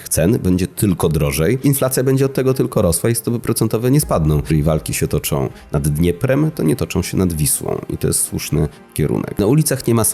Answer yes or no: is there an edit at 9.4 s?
yes